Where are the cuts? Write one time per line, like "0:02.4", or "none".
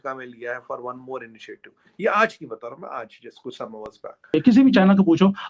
0:04.3